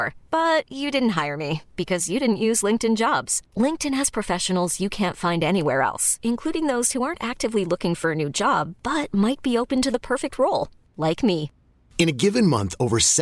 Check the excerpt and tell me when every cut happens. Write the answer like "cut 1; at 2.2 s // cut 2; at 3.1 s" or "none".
none